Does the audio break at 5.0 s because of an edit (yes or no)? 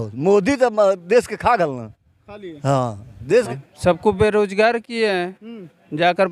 no